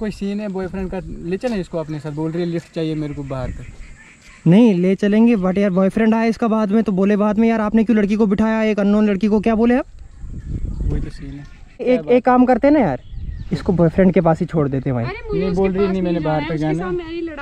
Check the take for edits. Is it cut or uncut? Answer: uncut